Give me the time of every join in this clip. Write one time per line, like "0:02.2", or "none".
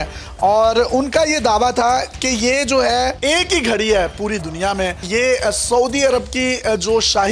0:03.2